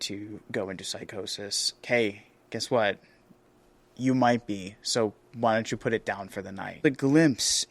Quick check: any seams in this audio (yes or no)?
yes